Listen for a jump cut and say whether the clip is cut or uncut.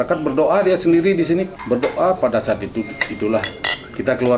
cut